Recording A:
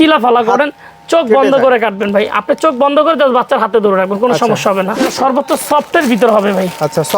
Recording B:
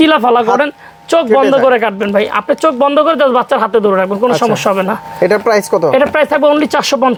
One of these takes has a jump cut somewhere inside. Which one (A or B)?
A